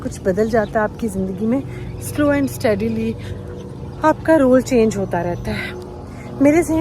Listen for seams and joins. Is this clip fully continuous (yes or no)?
yes